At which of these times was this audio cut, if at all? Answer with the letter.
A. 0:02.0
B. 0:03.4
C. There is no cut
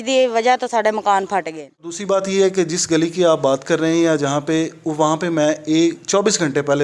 A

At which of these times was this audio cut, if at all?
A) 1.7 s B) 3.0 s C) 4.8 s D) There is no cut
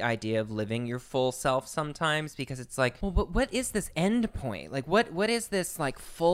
B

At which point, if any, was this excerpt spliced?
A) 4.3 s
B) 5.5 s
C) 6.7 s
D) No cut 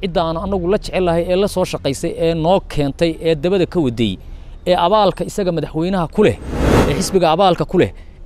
C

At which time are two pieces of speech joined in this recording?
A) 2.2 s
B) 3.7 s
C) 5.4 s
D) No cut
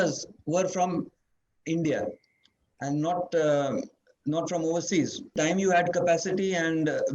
C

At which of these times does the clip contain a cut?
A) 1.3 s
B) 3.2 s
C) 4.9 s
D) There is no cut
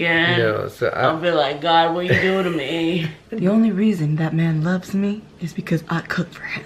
B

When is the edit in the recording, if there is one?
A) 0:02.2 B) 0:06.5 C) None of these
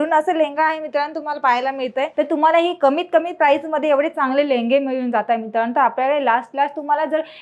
A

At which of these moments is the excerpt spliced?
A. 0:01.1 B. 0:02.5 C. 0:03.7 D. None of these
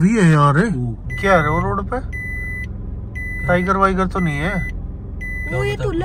A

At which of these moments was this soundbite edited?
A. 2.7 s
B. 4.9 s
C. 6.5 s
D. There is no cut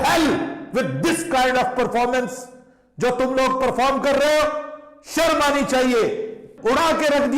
C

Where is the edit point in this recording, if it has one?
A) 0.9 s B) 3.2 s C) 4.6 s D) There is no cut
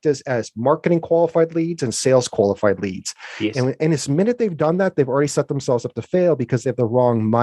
D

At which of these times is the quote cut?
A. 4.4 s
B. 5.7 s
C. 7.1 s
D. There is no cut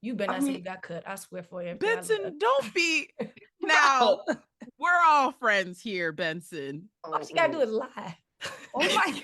C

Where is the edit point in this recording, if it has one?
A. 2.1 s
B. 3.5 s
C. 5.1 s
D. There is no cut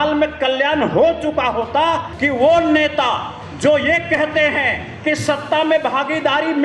A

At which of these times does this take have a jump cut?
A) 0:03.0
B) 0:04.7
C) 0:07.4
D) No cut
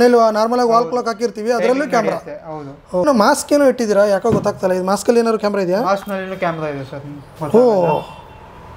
A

